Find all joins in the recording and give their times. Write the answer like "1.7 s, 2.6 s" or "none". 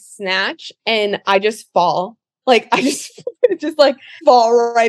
3.9 s